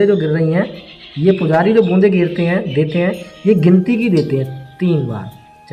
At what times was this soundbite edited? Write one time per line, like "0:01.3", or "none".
none

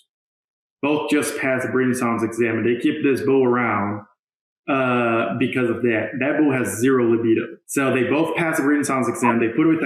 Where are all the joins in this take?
0:07.6

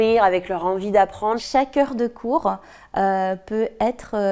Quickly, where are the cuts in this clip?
0:01.4

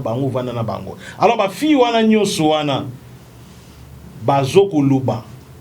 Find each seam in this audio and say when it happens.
none

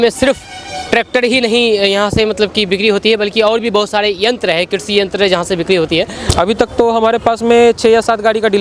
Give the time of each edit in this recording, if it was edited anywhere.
0:06.3

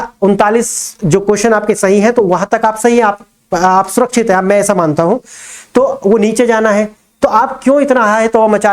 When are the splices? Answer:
none

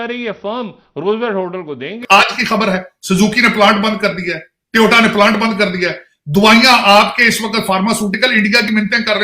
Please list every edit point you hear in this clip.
0:02.0

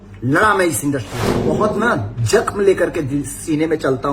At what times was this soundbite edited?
0:01.2

